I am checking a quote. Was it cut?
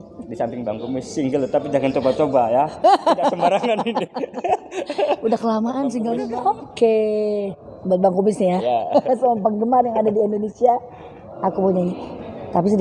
yes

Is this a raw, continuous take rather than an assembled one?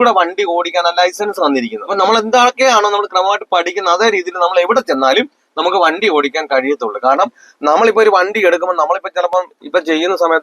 no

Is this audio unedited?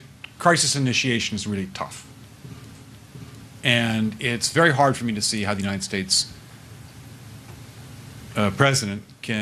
no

